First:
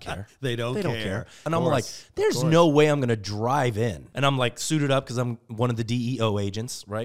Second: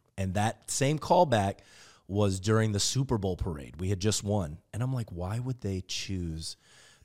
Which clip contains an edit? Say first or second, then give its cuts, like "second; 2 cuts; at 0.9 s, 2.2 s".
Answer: first; 2 cuts; at 1.4 s, 4.0 s